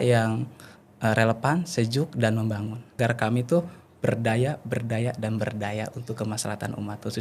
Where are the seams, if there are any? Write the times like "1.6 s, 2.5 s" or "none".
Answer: 3.0 s